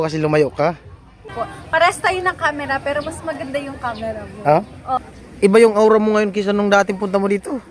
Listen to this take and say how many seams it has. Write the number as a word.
two